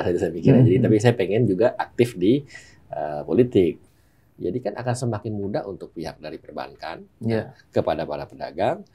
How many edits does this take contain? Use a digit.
1